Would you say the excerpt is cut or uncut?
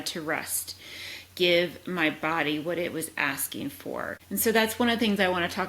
cut